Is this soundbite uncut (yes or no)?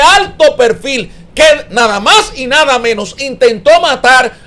yes